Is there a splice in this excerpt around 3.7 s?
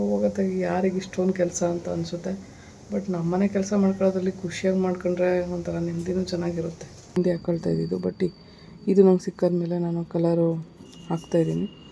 no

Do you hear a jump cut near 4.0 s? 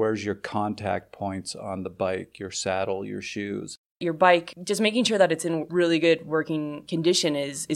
yes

